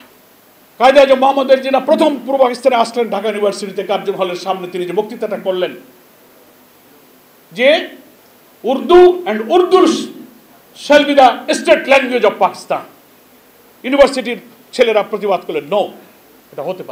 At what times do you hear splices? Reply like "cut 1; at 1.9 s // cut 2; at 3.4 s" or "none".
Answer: none